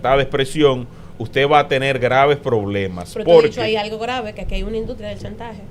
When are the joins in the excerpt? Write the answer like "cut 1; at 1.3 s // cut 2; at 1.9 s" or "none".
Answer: none